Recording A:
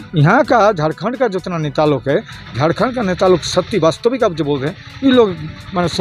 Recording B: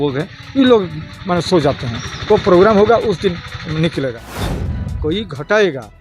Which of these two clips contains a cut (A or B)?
B